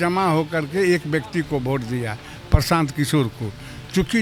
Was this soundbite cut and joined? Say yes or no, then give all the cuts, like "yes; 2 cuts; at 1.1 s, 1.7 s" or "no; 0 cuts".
no; 0 cuts